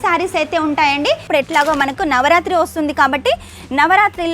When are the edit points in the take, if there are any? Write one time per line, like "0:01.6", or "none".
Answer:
0:01.3